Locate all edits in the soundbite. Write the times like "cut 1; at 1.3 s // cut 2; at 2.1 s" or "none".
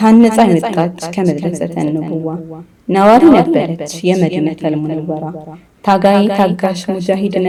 none